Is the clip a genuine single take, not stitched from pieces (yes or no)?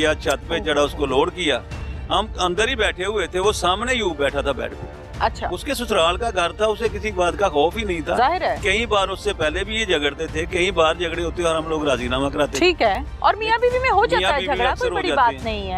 yes